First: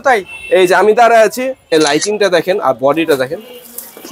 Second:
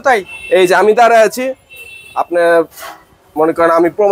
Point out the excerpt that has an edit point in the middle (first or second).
first